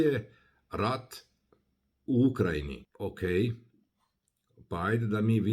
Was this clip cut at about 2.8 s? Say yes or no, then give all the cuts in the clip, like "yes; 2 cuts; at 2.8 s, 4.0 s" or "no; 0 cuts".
yes; 1 cut; at 2.8 s